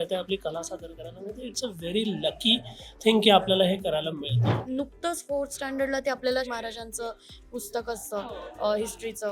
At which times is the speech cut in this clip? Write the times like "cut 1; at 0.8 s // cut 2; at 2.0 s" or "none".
cut 1; at 4.6 s